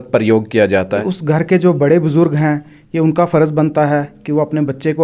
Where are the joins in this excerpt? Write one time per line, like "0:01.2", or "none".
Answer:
0:01.0